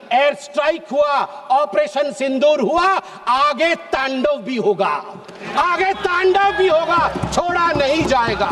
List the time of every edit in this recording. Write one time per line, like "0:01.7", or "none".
none